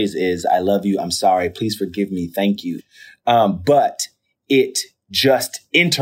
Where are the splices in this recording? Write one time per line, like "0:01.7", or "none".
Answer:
0:02.8